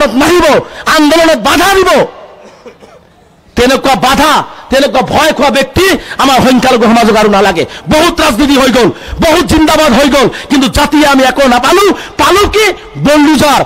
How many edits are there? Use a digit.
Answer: 0